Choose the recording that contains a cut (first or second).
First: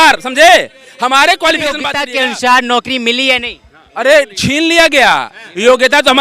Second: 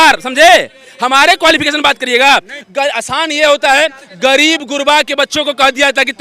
first